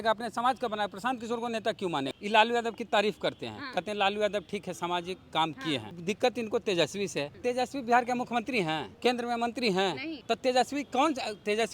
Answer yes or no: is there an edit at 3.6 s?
no